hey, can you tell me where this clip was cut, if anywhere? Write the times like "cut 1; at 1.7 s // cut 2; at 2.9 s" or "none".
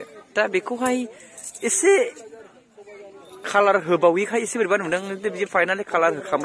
none